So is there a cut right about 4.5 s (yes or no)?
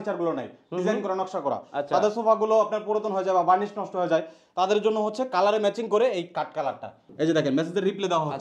no